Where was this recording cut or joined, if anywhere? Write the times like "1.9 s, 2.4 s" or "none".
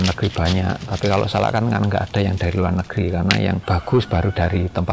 3.6 s